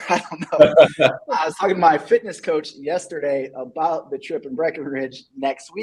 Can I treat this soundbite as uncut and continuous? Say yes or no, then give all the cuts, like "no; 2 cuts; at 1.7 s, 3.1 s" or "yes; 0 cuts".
yes; 0 cuts